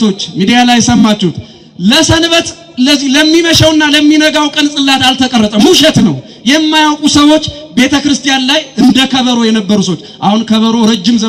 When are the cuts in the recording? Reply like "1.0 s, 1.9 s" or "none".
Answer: none